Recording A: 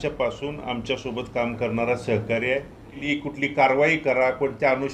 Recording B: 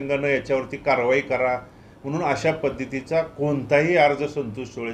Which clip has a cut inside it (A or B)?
A